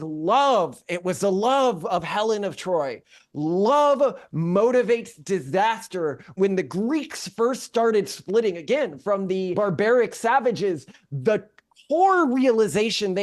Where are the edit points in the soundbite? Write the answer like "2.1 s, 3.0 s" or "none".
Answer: 6.3 s, 9.5 s